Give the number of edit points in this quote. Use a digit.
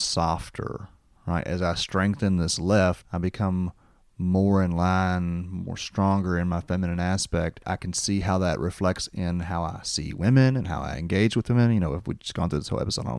2